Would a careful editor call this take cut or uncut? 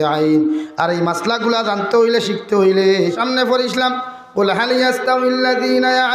cut